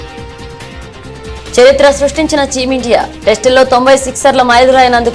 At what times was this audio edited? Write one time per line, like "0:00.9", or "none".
0:01.5